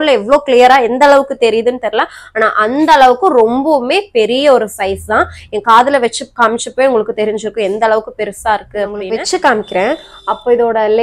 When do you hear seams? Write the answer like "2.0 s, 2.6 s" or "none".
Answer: 9.0 s